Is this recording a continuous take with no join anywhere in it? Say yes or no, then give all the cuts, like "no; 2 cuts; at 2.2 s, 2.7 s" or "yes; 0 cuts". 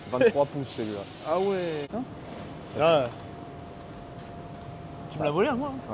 no; 1 cut; at 1.8 s